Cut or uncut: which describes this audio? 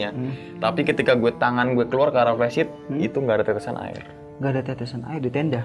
uncut